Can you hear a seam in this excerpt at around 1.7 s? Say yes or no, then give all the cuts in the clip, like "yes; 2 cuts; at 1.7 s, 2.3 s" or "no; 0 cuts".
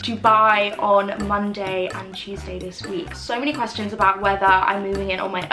no; 1 cut; at 3.1 s